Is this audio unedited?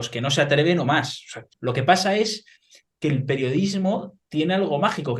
no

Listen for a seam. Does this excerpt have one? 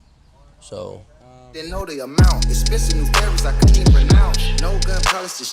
yes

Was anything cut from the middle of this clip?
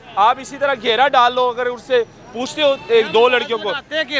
no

